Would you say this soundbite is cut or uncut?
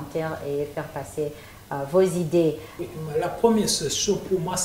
cut